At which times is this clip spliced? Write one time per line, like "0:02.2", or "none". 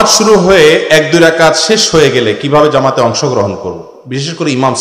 none